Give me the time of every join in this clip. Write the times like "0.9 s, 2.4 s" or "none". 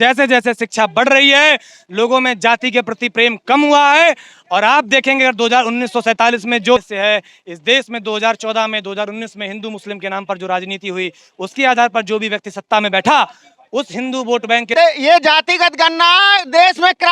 6.8 s, 14.7 s